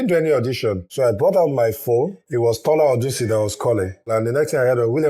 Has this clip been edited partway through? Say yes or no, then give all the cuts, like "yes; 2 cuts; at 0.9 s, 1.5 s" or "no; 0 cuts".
yes; 3 cuts; at 0.9 s, 2.2 s, 4.1 s